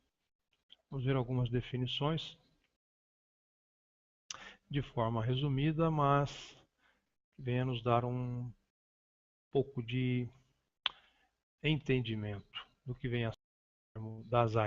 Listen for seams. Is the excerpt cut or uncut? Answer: cut